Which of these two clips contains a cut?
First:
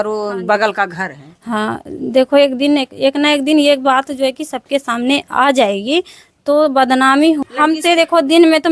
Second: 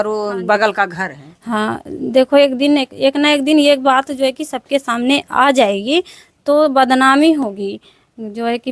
first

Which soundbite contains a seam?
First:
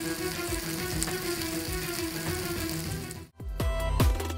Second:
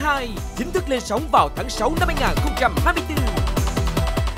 first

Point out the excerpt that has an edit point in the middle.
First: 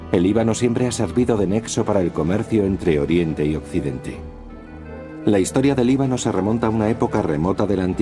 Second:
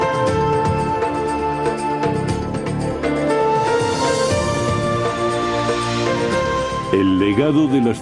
second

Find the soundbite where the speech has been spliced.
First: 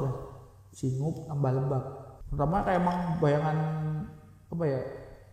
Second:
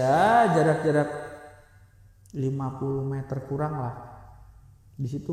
first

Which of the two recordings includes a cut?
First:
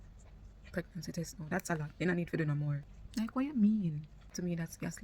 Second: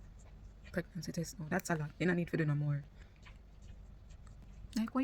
first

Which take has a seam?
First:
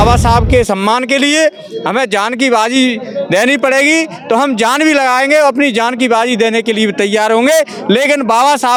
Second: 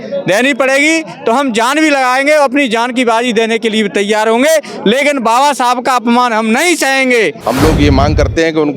second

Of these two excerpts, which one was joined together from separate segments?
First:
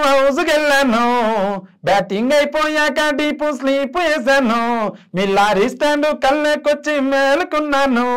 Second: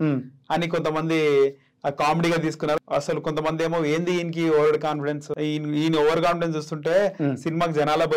second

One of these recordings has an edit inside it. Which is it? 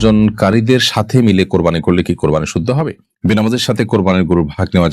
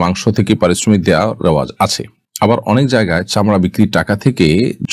first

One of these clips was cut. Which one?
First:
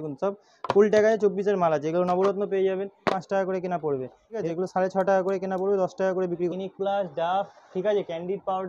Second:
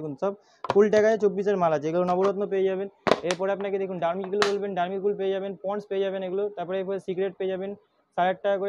first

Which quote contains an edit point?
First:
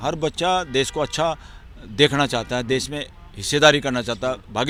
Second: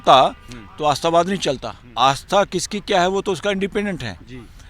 second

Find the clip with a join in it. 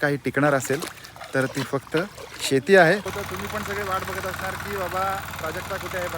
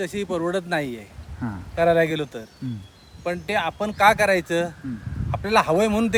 first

